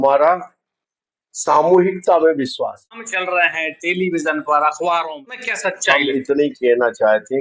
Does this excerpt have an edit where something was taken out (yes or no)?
yes